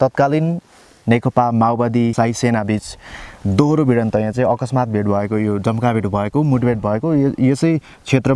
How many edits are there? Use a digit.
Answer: 1